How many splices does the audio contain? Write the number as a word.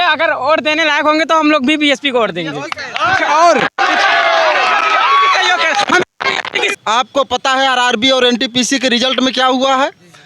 one